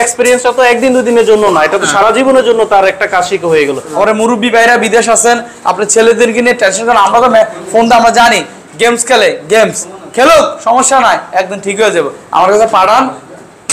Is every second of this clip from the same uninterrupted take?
no; 1 cut; at 3.9 s

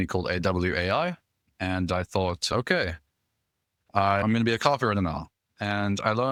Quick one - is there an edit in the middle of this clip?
no; 0 cuts

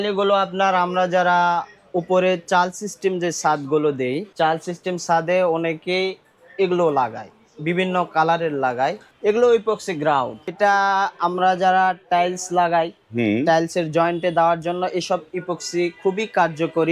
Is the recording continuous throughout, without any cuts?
no; 3 cuts; at 4.3 s, 9.1 s, 10.5 s

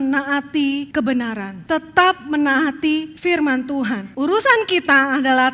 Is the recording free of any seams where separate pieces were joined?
no; 4 cuts; at 0.9 s, 1.5 s, 3.1 s, 4.1 s

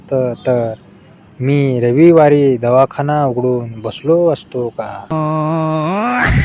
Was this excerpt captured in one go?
no; 1 cut; at 4.9 s

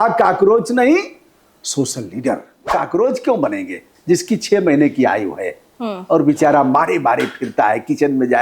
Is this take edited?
yes; 1 cut; at 2.7 s

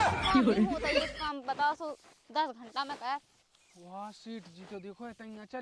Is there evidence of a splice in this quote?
yes; 1 cut; at 1.1 s

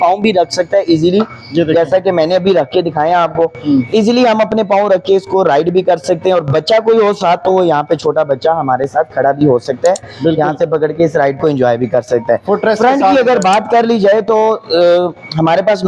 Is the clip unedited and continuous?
yes; 0 cuts

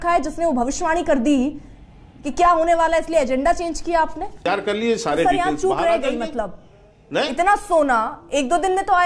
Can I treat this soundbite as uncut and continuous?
no; 1 cut; at 4.5 s

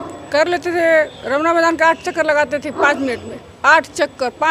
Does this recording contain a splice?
no; 0 cuts

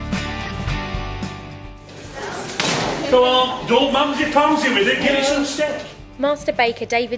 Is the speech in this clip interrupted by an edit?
no; 0 cuts

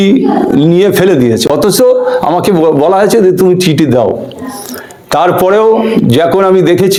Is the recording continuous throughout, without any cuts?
yes; 0 cuts

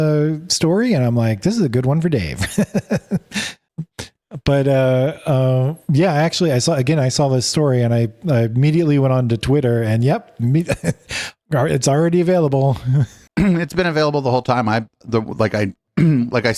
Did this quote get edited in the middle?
no; 0 cuts

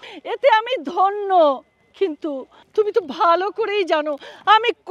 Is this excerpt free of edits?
yes; 0 cuts

